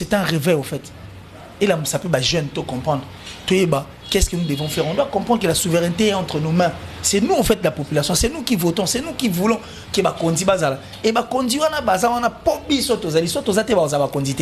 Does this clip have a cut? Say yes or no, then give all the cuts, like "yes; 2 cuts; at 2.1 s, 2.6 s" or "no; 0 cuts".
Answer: no; 0 cuts